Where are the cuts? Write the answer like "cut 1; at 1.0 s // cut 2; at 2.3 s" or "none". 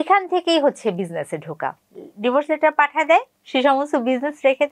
cut 1; at 1.8 s